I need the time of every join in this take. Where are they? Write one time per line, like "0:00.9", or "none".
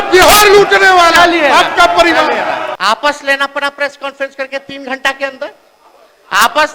0:02.7